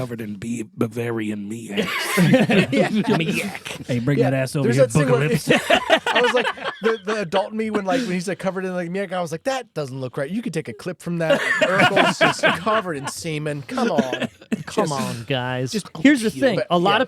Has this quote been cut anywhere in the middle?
yes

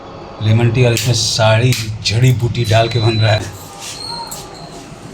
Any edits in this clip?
yes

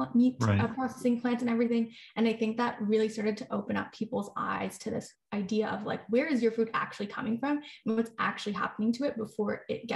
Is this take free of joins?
yes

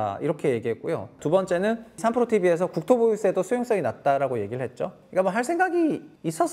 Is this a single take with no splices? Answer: no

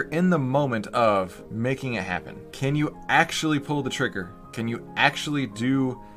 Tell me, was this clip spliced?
yes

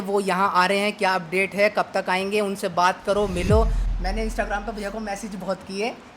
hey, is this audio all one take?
no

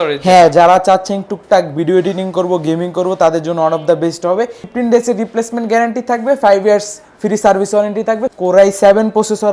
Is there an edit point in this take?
yes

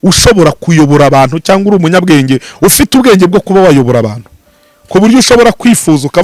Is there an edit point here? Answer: no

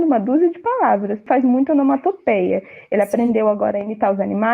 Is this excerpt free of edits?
no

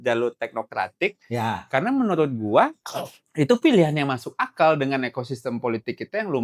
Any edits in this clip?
no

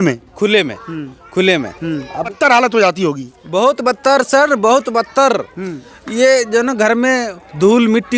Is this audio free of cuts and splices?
no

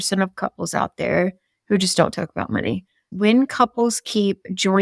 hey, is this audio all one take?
no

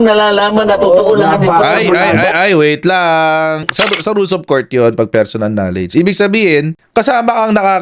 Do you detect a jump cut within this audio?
yes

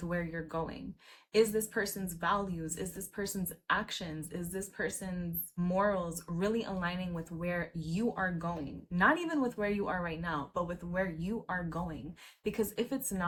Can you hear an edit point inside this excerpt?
no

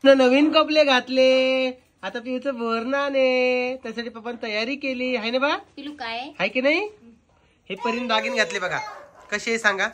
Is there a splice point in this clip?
no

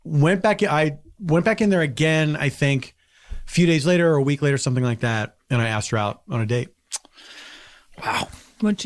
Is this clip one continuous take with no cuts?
yes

